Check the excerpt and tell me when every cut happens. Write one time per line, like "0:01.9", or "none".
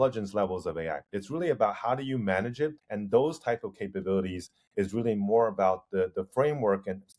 0:02.9